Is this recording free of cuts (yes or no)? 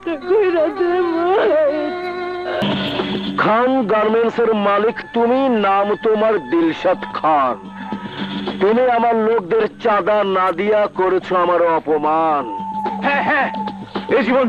no